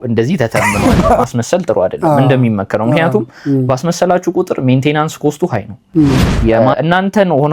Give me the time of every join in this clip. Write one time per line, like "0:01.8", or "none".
0:01.2
0:06.6

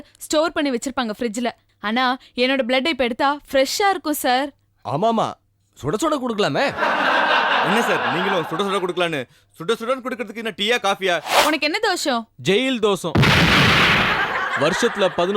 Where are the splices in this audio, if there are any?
0:11.3

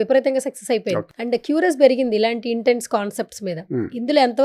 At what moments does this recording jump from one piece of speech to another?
0:01.1

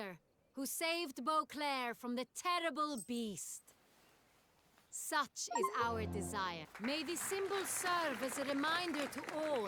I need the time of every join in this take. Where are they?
0:06.7

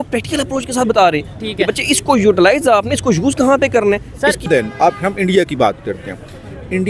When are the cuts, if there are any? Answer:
0:04.5

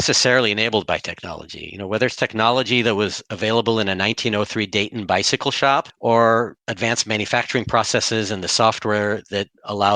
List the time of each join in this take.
0:05.9
0:06.6

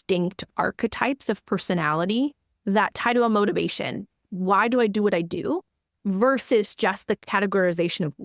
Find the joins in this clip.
0:04.2
0:07.2

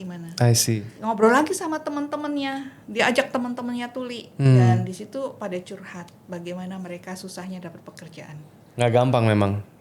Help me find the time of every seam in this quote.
0:00.9
0:08.6

